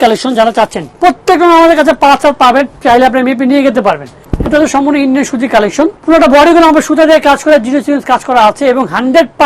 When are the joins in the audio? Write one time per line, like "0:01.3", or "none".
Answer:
0:00.9
0:04.1
0:06.0